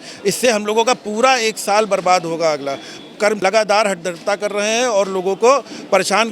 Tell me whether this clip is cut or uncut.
cut